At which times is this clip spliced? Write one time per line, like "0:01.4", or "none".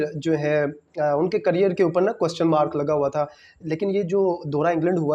none